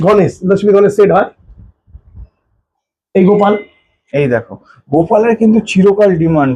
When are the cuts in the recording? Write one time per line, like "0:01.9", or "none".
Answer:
none